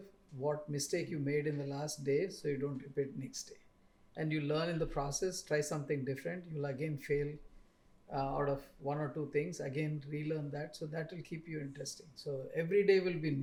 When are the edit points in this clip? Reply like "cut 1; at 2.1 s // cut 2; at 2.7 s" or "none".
none